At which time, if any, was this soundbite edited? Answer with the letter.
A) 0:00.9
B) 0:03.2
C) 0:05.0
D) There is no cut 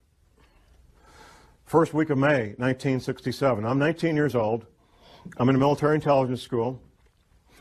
B